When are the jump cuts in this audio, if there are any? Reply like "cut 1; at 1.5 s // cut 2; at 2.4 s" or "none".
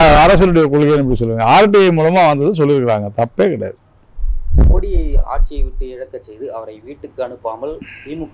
none